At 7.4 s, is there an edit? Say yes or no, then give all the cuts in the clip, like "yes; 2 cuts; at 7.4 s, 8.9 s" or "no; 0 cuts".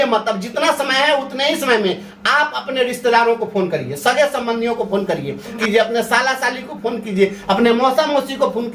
no; 1 cut; at 5.6 s